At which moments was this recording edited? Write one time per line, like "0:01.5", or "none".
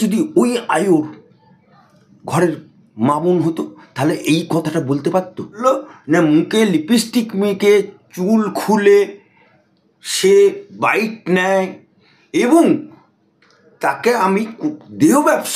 0:05.6